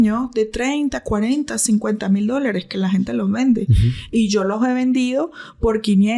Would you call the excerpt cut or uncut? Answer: uncut